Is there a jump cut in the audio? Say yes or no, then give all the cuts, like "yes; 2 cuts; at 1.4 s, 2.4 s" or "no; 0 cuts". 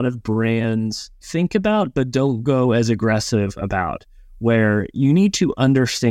yes; 1 cut; at 1.2 s